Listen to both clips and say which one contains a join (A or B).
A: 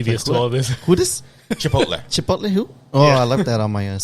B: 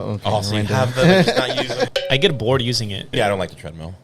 B